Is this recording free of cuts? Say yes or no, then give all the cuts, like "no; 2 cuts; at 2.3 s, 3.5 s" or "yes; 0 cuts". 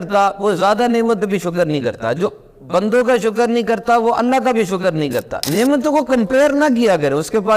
no; 1 cut; at 5.4 s